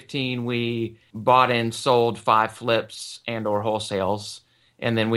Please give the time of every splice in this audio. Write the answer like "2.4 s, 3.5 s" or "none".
1.1 s